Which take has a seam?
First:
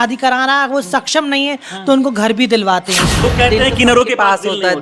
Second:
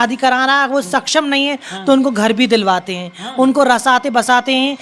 first; 1 cut; at 3.0 s

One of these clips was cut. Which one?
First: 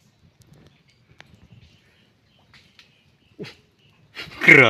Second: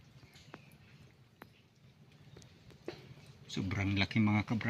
second; 1 cut; at 1.6 s

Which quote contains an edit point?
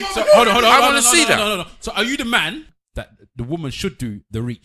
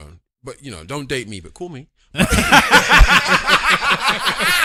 first; 1 cut; at 2.7 s

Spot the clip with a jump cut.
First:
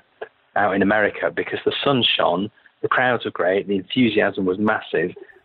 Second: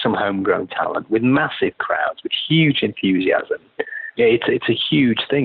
second; 1 cut; at 4.0 s

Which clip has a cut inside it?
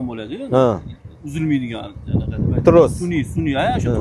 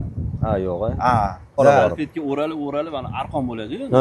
second; 1 cut; at 1.6 s

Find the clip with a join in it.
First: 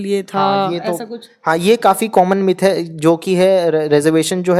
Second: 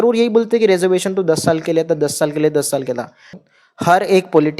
second; 1 cut; at 3.3 s

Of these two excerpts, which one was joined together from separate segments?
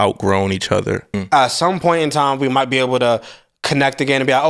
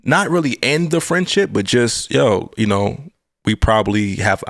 first; 1 cut; at 1.2 s

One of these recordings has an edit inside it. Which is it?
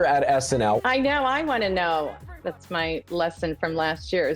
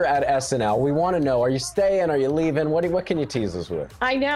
first; 2 cuts; at 0.8 s, 2.2 s

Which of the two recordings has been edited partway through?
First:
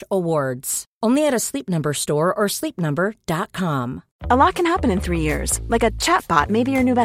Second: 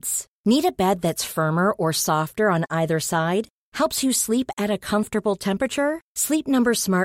first; 1 cut; at 4.1 s

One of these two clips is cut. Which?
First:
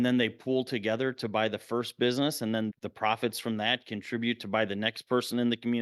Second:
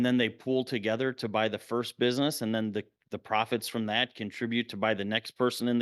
first; 1 cut; at 2.7 s

